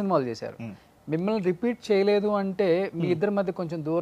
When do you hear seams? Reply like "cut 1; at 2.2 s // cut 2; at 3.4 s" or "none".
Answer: none

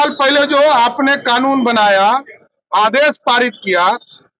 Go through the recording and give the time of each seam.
none

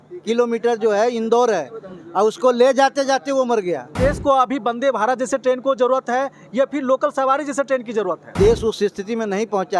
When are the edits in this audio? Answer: cut 1; at 3.9 s // cut 2; at 8.3 s

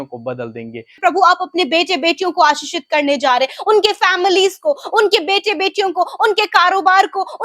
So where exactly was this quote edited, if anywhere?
cut 1; at 0.9 s

